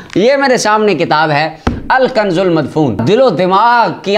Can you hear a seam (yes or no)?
yes